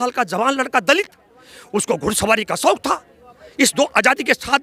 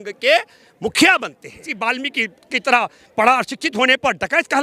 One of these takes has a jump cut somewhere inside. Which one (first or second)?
second